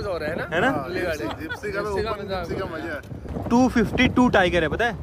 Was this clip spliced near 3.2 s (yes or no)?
yes